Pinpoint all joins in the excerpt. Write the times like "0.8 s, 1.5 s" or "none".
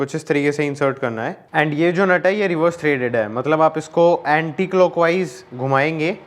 1.3 s